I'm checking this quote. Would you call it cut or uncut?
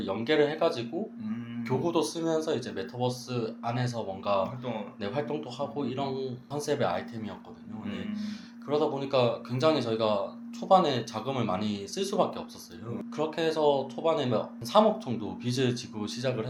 uncut